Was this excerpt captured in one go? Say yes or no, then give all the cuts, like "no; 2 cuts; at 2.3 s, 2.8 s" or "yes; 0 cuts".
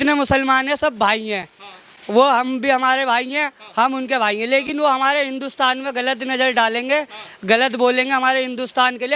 yes; 0 cuts